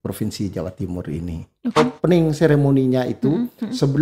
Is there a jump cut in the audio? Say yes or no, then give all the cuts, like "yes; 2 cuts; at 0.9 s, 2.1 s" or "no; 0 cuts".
yes; 1 cut; at 1.7 s